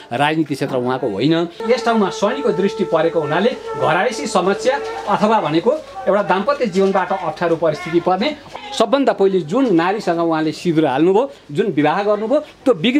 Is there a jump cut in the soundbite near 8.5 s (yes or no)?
yes